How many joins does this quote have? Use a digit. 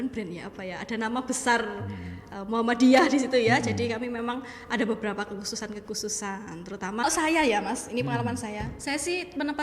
1